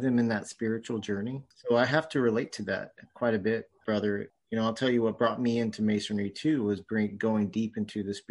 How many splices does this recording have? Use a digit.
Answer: 2